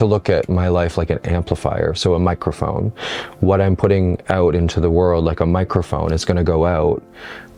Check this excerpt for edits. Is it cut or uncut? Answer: uncut